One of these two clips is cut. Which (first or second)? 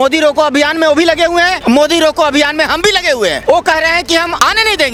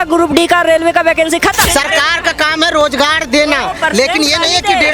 second